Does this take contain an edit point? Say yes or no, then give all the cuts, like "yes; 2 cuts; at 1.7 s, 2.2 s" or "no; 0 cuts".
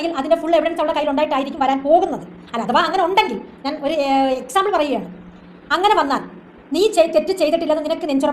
no; 0 cuts